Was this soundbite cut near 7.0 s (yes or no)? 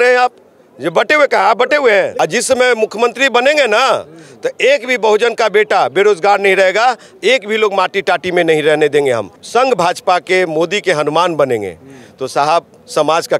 no